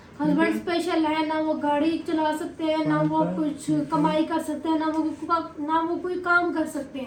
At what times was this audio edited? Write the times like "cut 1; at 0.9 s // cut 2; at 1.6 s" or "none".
none

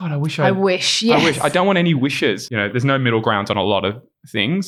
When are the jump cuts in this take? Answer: cut 1; at 2.4 s

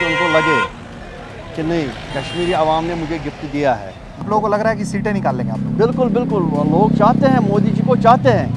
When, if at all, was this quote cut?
cut 1; at 4.3 s

